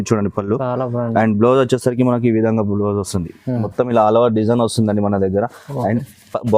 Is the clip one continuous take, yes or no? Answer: no